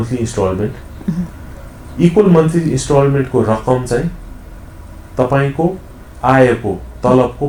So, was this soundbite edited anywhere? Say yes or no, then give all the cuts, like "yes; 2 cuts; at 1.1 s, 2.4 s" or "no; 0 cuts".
no; 0 cuts